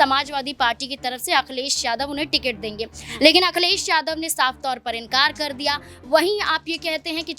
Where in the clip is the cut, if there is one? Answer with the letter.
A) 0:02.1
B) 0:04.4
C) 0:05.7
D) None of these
D